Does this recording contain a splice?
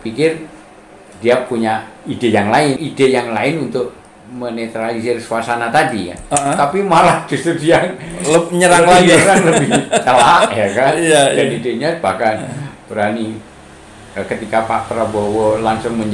yes; 1 cut; at 2.8 s

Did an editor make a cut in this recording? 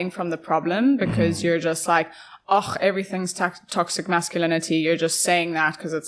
no; 0 cuts

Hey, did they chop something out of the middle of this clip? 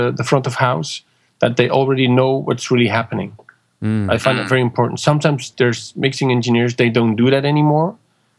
no; 0 cuts

